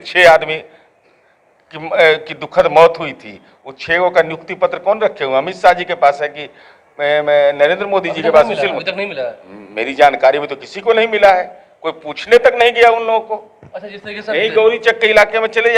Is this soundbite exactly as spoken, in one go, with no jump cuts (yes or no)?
yes